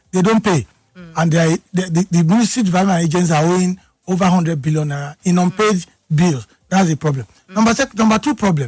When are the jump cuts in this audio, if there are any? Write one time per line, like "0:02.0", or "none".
none

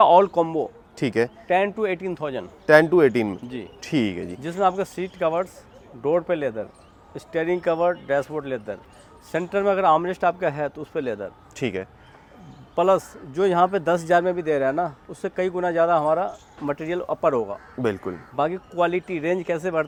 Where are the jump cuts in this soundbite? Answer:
none

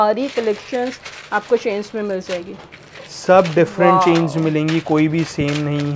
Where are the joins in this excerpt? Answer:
none

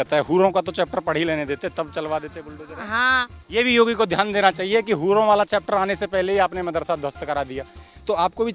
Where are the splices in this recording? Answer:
0:03.4

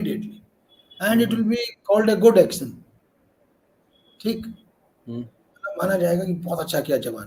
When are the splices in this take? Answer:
none

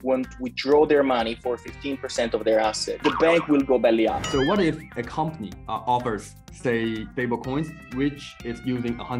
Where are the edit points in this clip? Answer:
0:04.2

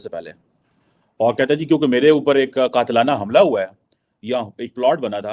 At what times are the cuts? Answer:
none

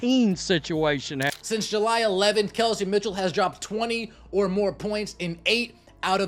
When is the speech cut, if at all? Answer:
0:01.4

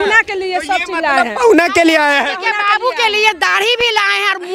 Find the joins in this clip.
none

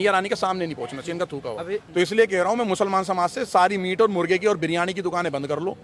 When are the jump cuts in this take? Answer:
0:01.8

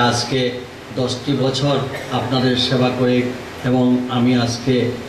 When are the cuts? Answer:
none

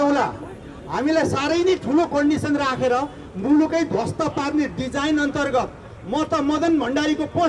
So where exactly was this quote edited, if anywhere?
none

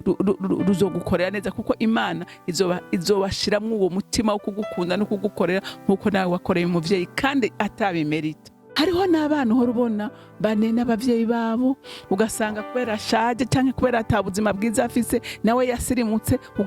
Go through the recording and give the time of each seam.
0:08.6

